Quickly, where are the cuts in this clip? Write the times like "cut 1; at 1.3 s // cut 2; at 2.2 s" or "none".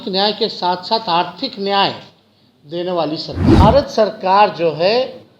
cut 1; at 3.6 s